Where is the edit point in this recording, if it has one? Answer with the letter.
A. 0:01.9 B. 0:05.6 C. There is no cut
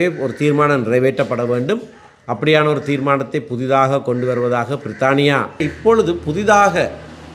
B